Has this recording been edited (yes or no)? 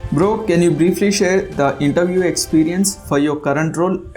no